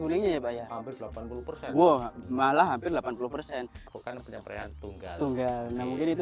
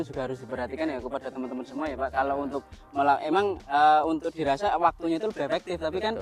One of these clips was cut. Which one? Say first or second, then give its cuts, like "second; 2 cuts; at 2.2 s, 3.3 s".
first; 1 cut; at 3.9 s